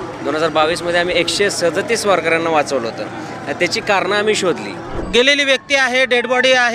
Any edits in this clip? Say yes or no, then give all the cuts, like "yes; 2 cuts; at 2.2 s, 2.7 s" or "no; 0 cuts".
yes; 1 cut; at 5.0 s